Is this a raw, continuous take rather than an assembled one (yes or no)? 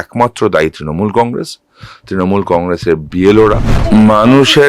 no